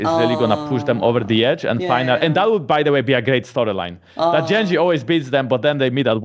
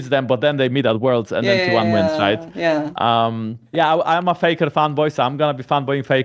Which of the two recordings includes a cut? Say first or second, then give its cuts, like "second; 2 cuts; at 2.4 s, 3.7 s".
second; 1 cut; at 3.6 s